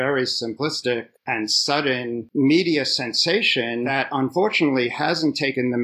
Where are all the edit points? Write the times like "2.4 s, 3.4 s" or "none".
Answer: 2.3 s, 3.9 s